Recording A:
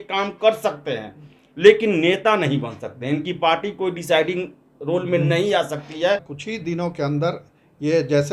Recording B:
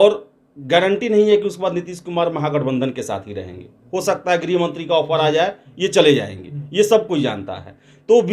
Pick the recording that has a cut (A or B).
A